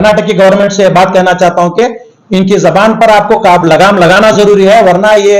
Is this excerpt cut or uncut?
uncut